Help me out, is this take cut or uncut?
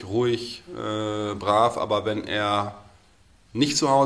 uncut